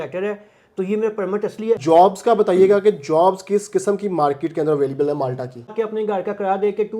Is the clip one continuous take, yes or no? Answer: no